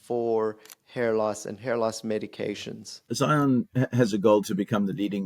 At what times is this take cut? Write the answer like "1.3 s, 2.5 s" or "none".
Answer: 3.0 s